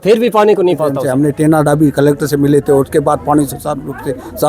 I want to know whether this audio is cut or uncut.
cut